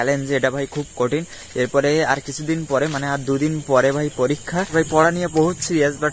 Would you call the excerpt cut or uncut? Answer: cut